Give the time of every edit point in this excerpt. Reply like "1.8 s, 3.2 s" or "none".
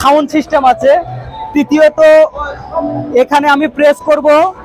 none